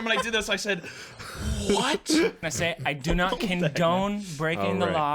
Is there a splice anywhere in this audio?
yes; 1 cut; at 2.4 s

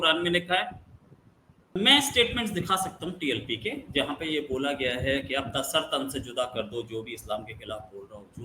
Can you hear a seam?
yes; 1 cut; at 1.7 s

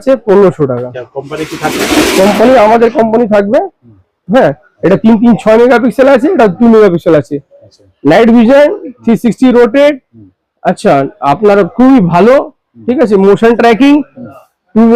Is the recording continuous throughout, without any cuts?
yes; 0 cuts

